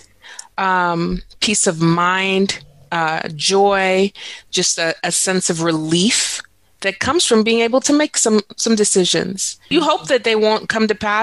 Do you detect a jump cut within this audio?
yes; 1 cut; at 9.6 s

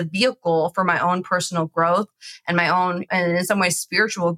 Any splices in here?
yes; 1 cut; at 3.1 s

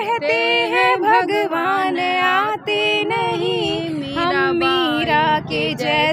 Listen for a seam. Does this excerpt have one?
no; 0 cuts

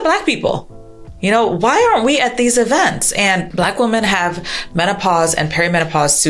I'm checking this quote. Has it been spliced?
yes; 1 cut; at 3.5 s

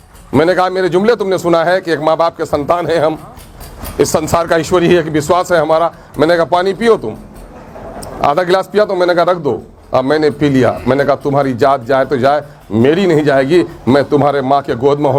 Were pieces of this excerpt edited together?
no; 0 cuts

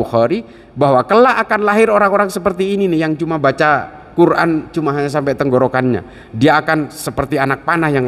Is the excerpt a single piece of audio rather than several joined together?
yes; 0 cuts

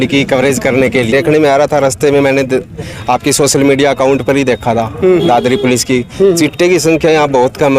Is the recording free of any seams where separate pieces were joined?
no; 1 cut; at 1.1 s

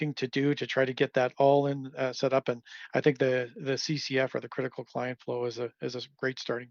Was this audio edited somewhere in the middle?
no; 0 cuts

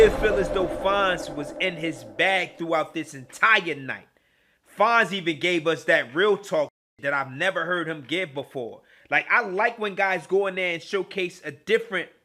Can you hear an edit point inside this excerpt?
no; 0 cuts

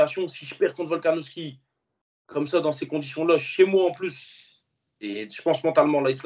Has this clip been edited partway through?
no; 0 cuts

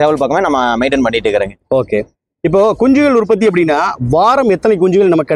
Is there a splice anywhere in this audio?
no; 0 cuts

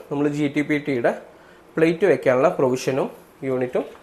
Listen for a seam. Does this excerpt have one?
no; 0 cuts

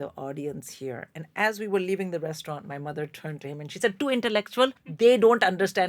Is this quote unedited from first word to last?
no; 1 cut; at 4.8 s

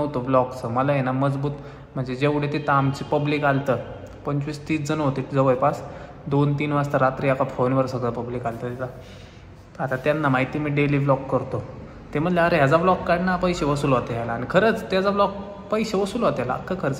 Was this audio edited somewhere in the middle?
no; 0 cuts

